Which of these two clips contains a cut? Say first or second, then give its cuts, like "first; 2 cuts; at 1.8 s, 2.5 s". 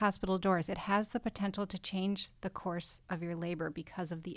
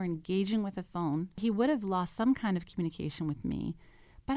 second; 1 cut; at 1.4 s